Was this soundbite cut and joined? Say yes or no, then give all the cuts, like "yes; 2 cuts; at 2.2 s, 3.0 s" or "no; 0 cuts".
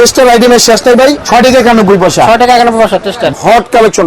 yes; 2 cuts; at 1.2 s, 3.3 s